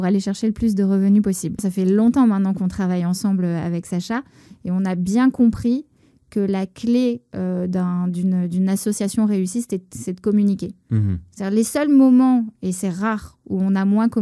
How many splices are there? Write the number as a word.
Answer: one